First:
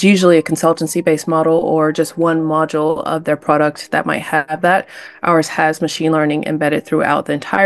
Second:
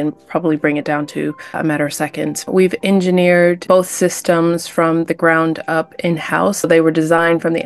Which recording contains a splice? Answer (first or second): second